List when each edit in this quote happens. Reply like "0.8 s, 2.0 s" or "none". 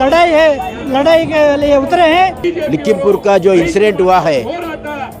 2.4 s